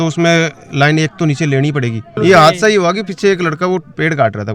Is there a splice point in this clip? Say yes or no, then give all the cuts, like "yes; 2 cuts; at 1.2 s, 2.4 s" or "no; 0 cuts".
yes; 1 cut; at 2.1 s